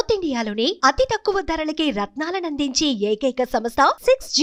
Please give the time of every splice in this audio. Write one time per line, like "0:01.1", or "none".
none